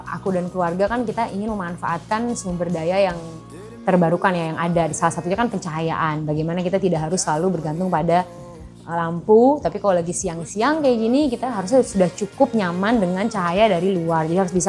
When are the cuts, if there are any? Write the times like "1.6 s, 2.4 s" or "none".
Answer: none